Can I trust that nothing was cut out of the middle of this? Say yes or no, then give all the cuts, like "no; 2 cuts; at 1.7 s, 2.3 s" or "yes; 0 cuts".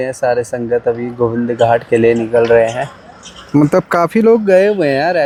yes; 0 cuts